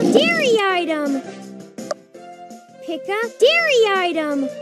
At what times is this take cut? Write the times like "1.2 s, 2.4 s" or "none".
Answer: none

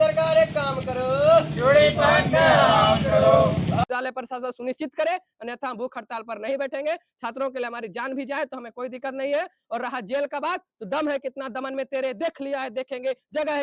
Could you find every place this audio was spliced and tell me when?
3.8 s

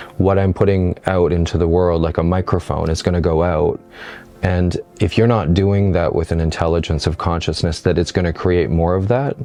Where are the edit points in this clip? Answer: none

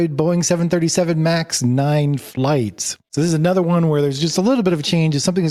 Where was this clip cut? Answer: none

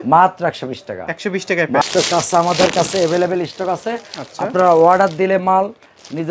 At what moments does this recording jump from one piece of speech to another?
1.8 s

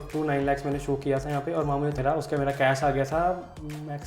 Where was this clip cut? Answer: 2.0 s

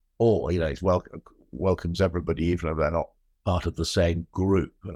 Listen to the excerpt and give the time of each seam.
3.2 s

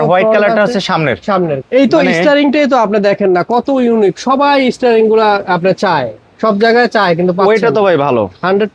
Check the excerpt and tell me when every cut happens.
1.6 s

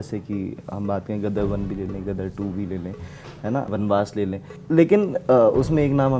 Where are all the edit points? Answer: 3.7 s, 4.5 s

